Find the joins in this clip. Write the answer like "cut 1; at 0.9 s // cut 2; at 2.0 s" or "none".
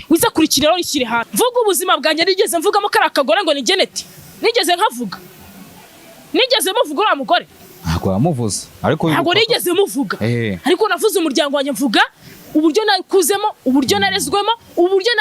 cut 1; at 1.3 s